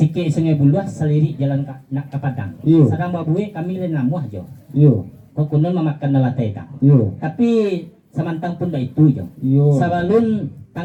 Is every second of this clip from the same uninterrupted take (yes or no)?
yes